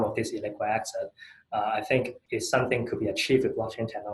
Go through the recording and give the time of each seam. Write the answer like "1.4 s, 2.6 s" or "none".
2.2 s